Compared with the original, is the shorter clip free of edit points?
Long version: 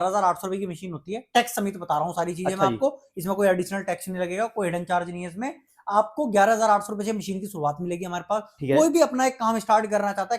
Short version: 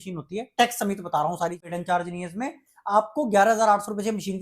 no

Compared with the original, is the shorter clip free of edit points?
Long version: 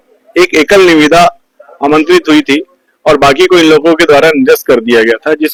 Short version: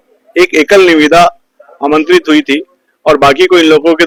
yes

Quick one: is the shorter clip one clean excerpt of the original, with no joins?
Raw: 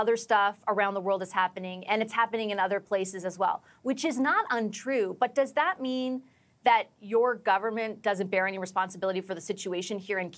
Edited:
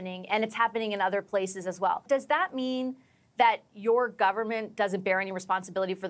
no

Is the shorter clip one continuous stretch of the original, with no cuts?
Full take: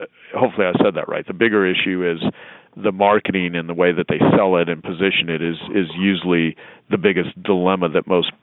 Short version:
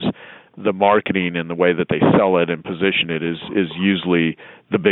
yes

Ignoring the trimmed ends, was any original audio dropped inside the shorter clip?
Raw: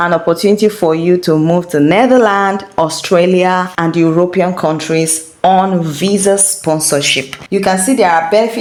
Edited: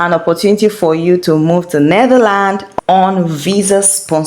yes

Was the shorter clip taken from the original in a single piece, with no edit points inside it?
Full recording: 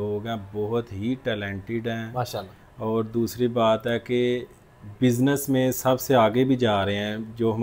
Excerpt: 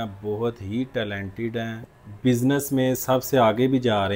no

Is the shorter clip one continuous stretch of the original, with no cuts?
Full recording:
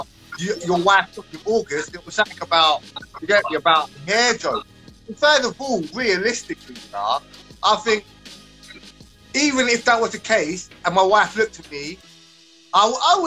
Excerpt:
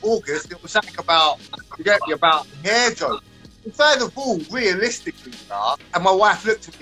no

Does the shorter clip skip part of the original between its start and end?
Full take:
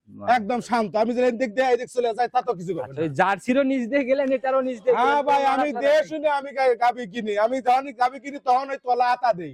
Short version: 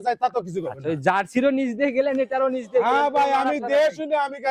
no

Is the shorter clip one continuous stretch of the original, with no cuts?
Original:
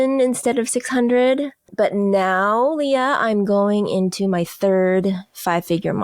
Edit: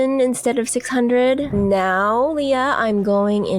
no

